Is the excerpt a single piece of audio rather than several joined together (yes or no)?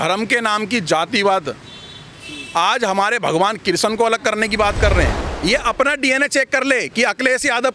no